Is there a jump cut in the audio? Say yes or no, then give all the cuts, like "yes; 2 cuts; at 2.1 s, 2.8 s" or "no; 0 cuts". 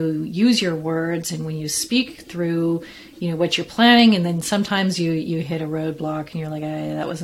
no; 0 cuts